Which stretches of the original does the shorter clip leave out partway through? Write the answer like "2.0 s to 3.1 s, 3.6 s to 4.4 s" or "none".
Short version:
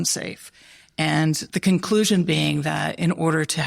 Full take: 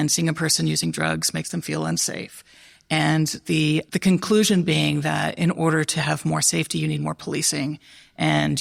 3.4 s to 3.9 s